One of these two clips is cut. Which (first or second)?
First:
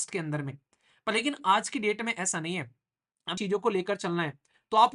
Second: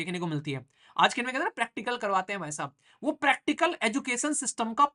first